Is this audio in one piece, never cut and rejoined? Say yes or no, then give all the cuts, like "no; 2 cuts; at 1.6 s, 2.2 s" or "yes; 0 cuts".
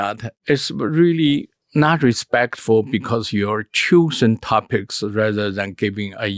yes; 0 cuts